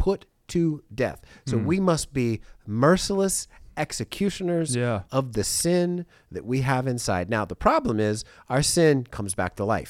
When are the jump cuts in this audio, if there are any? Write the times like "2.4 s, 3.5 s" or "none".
none